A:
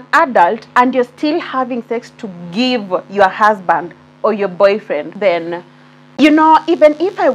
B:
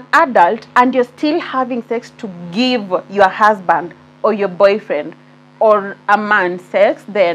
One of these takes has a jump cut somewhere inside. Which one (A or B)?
A